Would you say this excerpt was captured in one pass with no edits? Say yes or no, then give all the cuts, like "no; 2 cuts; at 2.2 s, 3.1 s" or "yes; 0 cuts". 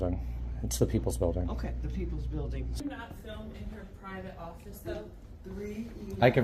no; 1 cut; at 2.8 s